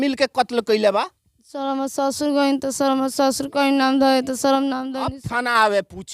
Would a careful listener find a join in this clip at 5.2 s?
yes; 1 cut; at 5.2 s

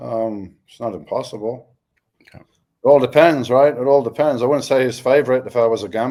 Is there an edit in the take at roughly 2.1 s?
no; 0 cuts

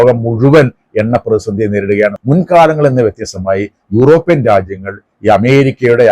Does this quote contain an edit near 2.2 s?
yes; 1 cut; at 2.2 s

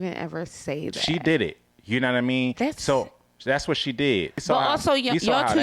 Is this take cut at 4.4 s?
yes; 1 cut; at 4.4 s

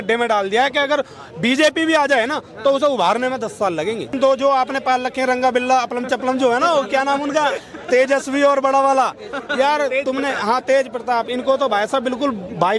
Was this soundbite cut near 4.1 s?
yes; 1 cut; at 4.1 s

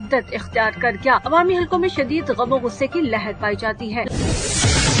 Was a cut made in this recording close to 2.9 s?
no; 1 cut; at 4.1 s

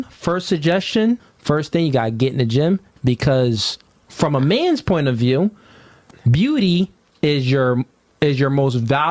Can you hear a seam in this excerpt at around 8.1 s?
no; 1 cut; at 1.3 s

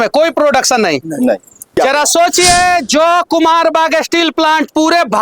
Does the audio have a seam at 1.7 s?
yes; 1 cut; at 1.7 s

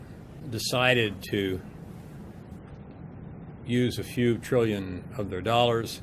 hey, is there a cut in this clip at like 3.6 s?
yes; 1 cut; at 3.6 s

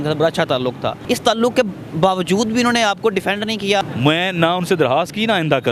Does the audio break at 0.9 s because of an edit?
yes; 2 cuts; at 0.9 s, 3.8 s

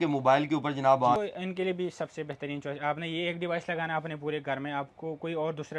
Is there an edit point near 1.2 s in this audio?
yes; 1 cut; at 1.2 s

